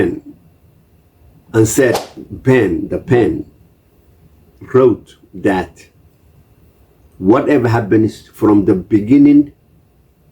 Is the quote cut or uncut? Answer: cut